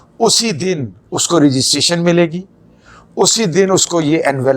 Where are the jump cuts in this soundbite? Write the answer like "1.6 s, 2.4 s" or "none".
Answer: none